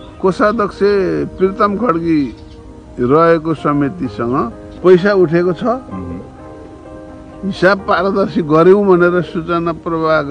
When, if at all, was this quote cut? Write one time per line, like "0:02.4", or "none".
0:04.6